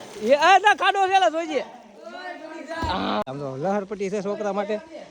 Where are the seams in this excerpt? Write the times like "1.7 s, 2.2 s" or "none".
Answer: 3.2 s